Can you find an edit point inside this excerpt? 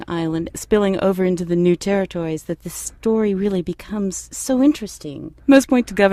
no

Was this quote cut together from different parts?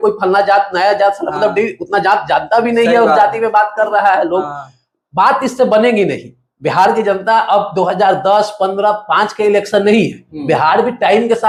no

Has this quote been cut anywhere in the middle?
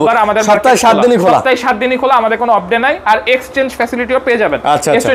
no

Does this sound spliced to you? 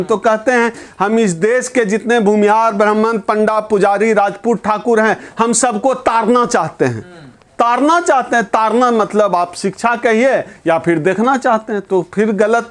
no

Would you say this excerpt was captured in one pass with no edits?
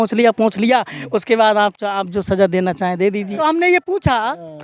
no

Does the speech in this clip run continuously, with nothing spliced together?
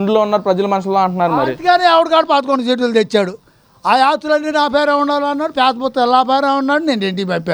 yes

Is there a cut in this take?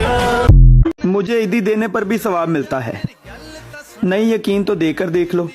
yes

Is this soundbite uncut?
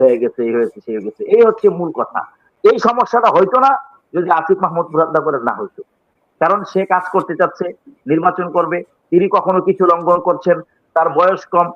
no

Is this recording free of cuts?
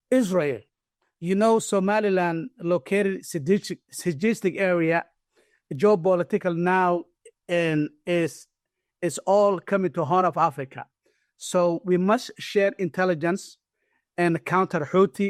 yes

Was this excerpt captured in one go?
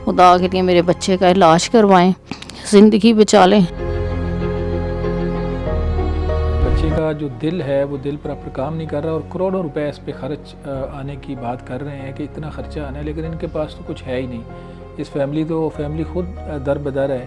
yes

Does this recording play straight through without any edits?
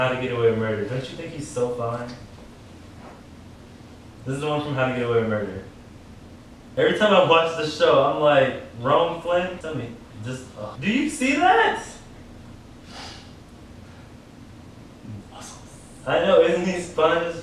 yes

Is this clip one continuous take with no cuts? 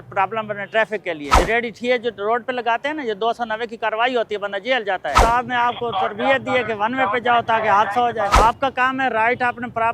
no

